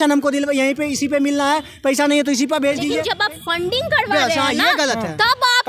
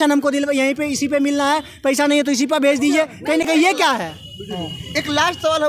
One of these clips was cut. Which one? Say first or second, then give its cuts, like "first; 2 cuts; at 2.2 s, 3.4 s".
first; 1 cut; at 3.0 s